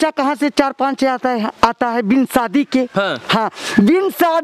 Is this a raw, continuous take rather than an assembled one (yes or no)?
yes